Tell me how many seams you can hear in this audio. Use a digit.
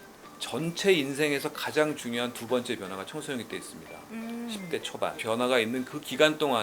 1